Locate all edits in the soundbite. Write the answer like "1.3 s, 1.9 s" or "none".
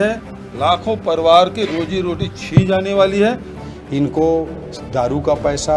3.6 s